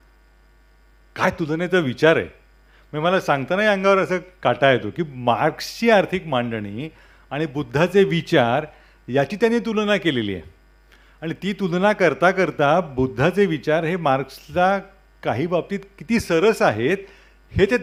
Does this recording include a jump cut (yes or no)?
no